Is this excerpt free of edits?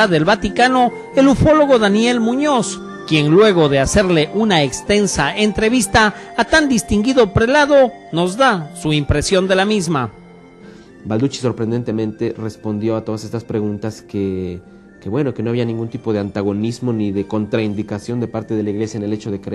no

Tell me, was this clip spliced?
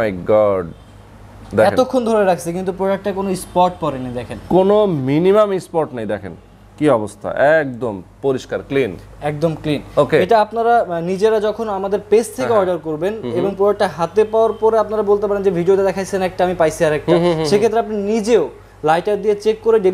no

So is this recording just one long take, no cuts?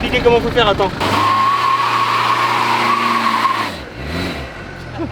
no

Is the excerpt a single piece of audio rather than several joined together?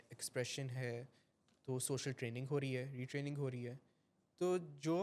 yes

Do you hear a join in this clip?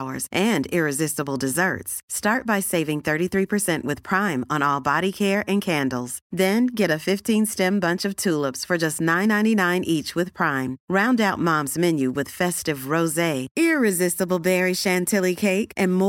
no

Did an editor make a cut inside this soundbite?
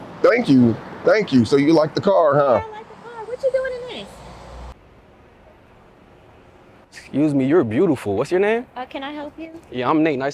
yes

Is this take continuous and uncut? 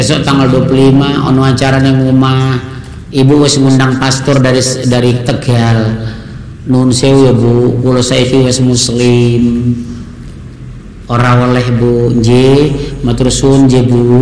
yes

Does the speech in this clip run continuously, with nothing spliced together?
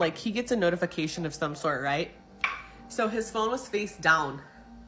yes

